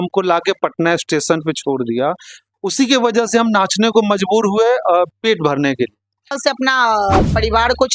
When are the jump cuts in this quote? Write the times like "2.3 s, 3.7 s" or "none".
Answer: 6.4 s